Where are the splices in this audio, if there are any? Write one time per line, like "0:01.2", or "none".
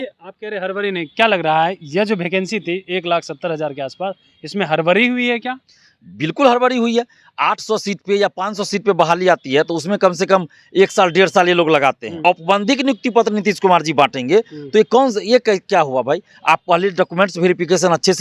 0:12.2